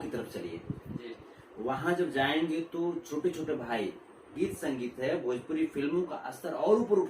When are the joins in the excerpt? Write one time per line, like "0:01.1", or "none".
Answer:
0:04.3